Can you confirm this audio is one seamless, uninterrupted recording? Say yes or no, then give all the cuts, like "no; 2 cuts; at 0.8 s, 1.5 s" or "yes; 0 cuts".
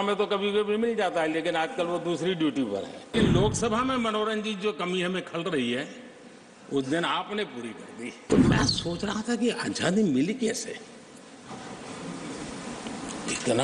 no; 2 cuts; at 3.1 s, 8.2 s